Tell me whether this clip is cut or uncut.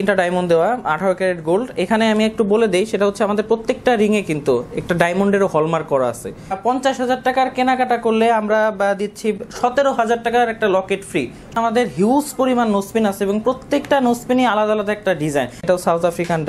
cut